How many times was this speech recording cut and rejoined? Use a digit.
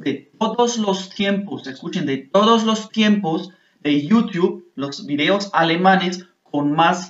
0